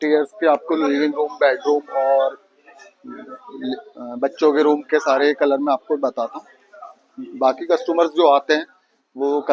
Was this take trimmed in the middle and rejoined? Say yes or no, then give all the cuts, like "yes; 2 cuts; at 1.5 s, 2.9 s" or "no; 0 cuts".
no; 0 cuts